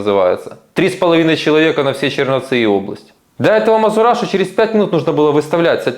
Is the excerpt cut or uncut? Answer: cut